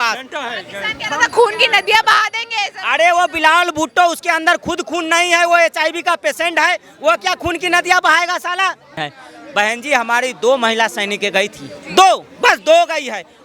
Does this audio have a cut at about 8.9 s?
yes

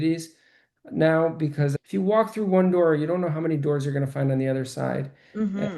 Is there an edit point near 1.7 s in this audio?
yes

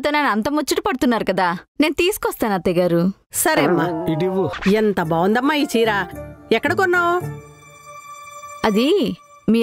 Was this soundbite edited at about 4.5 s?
yes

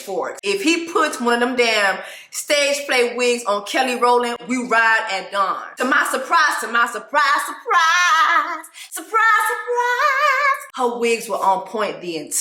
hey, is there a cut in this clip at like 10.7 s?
yes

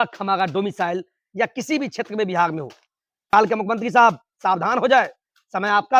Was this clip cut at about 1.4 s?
no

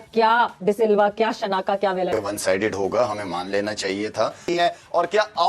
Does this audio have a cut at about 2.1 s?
yes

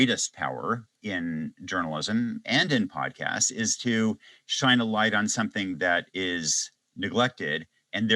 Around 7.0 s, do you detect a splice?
no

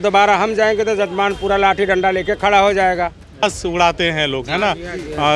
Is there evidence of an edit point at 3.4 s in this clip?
yes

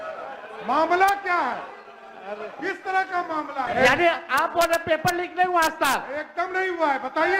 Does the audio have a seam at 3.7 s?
yes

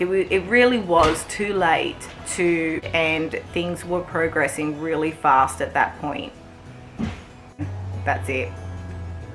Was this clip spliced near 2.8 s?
yes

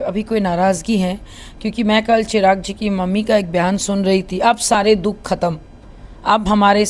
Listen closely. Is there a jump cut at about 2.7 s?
no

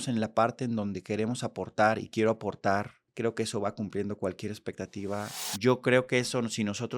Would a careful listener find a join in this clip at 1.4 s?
no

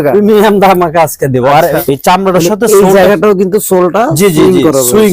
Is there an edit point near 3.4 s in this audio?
no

